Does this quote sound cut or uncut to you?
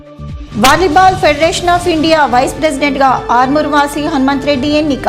uncut